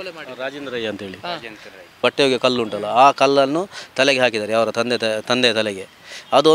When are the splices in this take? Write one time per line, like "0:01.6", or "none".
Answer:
0:02.0